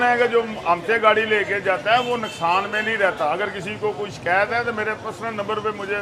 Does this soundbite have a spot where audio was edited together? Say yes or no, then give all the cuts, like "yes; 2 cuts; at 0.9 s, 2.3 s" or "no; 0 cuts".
no; 0 cuts